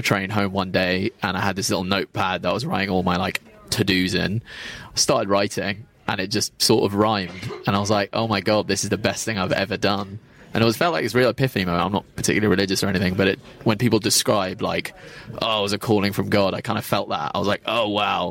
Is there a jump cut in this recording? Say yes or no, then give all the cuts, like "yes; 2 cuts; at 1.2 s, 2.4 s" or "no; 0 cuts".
no; 0 cuts